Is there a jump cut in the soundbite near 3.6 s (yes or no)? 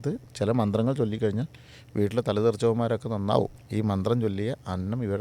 yes